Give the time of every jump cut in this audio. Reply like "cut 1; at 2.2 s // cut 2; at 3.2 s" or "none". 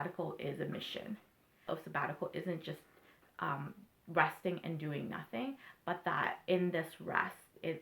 cut 1; at 1.7 s